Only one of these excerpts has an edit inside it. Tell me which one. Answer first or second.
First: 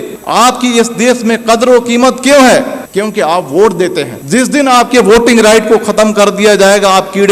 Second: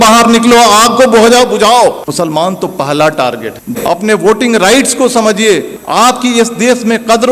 second